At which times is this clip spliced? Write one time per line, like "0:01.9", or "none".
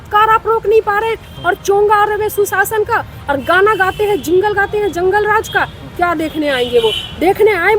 none